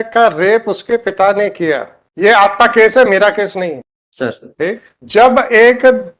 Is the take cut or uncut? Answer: uncut